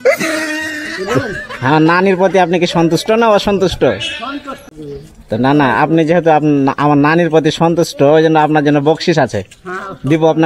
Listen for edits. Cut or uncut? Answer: cut